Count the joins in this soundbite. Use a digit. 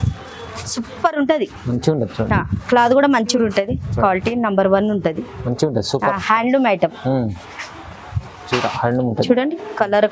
1